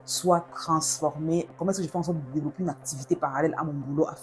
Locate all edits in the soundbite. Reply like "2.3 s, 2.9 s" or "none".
1.5 s